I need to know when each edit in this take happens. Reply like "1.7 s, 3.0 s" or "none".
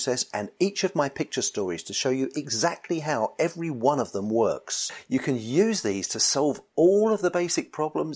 4.9 s